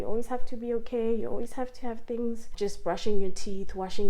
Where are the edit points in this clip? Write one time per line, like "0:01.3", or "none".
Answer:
0:02.5